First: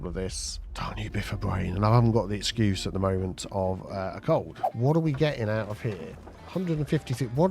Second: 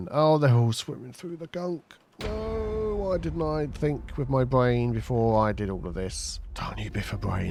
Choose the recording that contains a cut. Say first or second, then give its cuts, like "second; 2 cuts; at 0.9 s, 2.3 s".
first; 1 cut; at 4.6 s